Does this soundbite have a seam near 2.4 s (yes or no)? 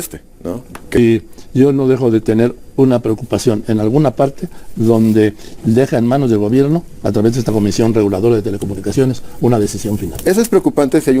no